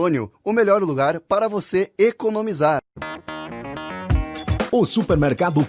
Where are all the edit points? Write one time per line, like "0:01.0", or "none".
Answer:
0:02.9